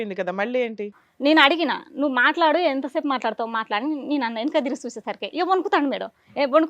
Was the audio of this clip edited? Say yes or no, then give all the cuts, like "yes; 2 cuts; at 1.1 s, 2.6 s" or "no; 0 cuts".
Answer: yes; 1 cut; at 1.0 s